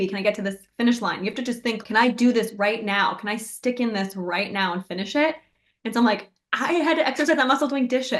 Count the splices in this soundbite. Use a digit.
1